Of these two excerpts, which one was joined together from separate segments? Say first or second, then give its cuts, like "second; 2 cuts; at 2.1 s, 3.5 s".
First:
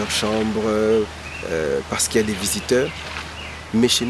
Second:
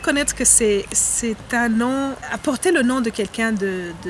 second; 1 cut; at 2.2 s